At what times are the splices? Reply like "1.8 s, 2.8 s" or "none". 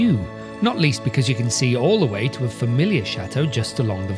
none